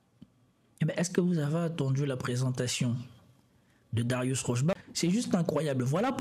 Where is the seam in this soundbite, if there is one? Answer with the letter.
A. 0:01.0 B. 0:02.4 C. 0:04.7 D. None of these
C